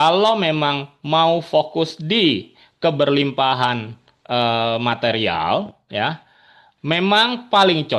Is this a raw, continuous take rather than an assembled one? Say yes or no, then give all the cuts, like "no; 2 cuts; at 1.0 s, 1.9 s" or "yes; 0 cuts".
yes; 0 cuts